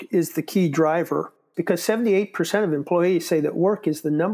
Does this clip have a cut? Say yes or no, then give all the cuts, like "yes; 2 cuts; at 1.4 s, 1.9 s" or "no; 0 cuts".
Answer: yes; 1 cut; at 1.3 s